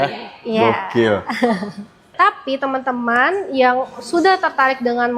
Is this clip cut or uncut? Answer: cut